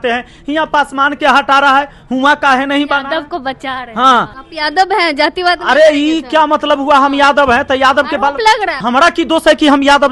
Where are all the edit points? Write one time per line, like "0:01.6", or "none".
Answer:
0:04.4
0:08.8